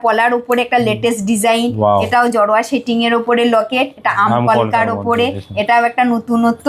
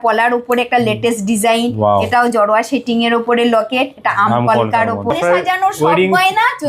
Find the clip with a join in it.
second; 1 cut; at 5.1 s

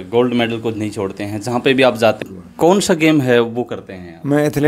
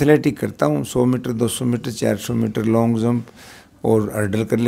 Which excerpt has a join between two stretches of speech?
first; 1 cut; at 2.2 s

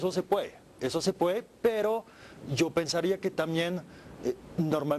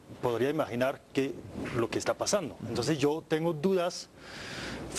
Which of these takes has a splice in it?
second; 1 cut; at 1.0 s

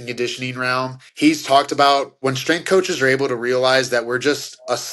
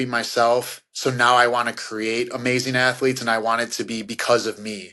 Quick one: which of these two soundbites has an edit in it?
first; 2 cuts; at 1.0 s, 2.2 s

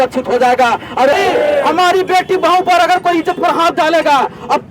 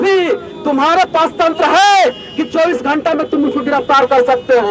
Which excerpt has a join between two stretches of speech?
first; 1 cut; at 1.1 s

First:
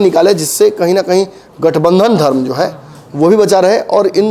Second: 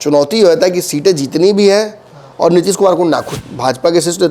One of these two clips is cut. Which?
second; 1 cut; at 3.3 s

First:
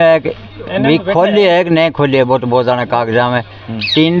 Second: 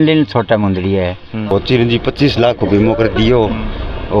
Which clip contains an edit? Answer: second; 1 cut; at 1.5 s

